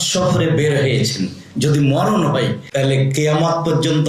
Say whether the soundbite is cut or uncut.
cut